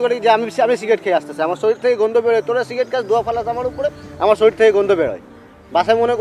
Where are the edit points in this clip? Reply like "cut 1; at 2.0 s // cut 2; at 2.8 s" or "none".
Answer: none